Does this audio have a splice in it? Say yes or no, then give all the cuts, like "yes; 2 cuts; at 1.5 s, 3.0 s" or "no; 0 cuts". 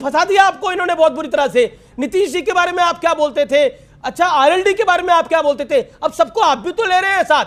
no; 0 cuts